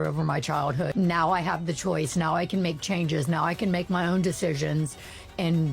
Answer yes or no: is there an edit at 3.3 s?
no